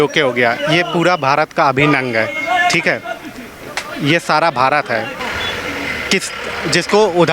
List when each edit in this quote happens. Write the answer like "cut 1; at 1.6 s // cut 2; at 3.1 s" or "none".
cut 1; at 5.1 s